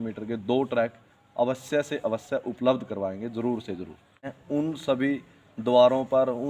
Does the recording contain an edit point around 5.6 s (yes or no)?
no